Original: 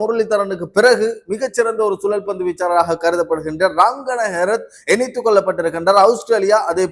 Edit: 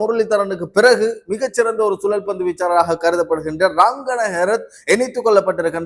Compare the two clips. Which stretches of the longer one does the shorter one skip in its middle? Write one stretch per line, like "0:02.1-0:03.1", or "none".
none